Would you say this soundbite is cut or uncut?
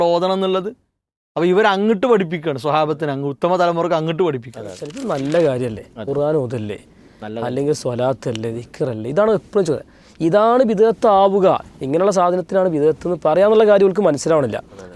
cut